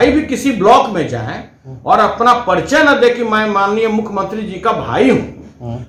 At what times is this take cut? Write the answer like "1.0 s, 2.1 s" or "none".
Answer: none